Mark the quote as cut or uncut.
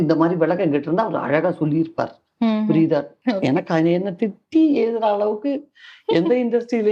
cut